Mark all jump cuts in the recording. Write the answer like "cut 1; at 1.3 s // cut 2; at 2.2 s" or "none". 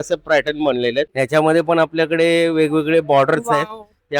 cut 1; at 1.1 s